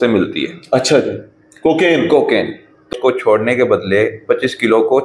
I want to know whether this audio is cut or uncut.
cut